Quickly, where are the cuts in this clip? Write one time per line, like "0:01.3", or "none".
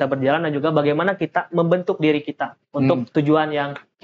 0:03.1